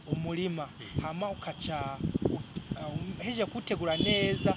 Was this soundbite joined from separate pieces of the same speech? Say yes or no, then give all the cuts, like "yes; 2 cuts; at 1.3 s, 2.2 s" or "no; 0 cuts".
no; 0 cuts